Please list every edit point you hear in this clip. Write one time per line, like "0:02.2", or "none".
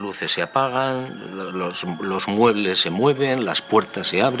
none